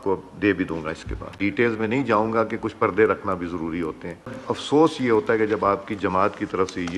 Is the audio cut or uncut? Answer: cut